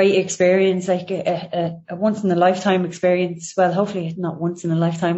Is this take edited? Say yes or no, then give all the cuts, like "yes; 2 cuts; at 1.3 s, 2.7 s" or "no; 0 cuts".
no; 0 cuts